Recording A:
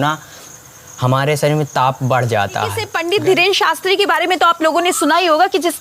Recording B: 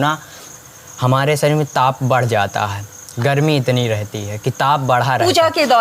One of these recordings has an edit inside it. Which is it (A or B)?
A